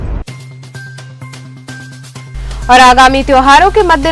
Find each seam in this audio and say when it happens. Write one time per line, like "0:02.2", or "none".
0:02.2